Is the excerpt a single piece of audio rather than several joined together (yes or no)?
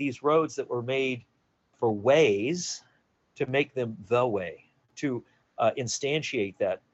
no